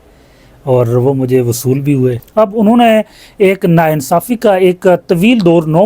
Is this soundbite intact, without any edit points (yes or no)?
no